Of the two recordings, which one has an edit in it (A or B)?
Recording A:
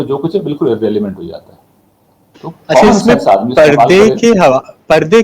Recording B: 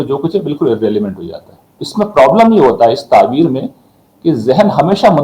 B